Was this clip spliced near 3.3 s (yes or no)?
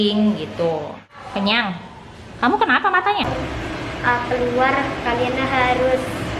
yes